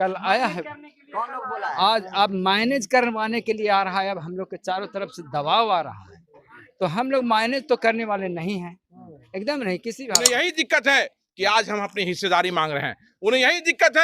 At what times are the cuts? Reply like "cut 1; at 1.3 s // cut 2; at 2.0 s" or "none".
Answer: cut 1; at 10.2 s